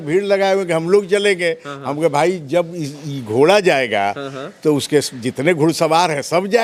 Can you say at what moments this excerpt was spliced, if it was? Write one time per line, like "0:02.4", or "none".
none